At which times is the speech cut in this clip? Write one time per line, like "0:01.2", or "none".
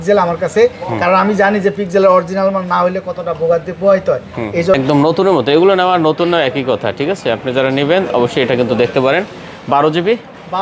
0:04.8